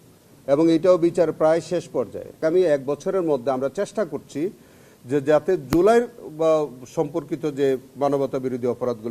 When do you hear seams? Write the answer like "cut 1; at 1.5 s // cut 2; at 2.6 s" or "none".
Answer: cut 1; at 2.4 s